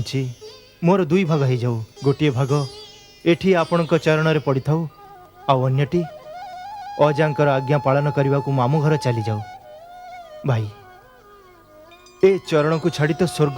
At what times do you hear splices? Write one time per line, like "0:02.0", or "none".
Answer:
0:01.9

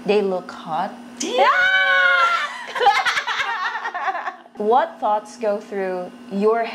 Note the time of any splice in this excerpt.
0:04.5

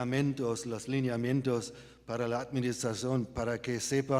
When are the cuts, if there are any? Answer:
none

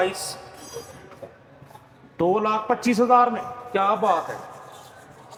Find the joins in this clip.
none

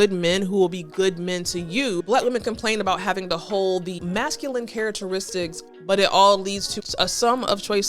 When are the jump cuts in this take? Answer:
0:02.0
0:04.0
0:05.7
0:06.7

